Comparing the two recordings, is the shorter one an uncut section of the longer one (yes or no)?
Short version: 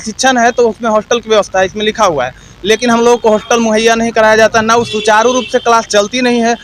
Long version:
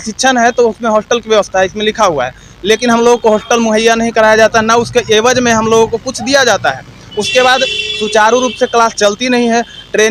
no